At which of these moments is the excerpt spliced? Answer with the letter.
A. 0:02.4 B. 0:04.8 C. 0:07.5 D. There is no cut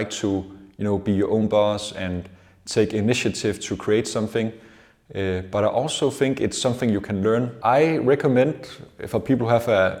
C